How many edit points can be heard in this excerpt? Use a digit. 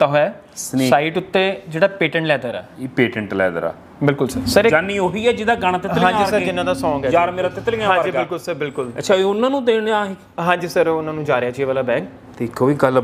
1